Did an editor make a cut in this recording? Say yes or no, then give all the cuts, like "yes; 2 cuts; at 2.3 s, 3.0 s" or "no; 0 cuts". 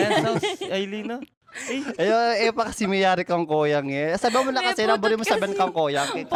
no; 0 cuts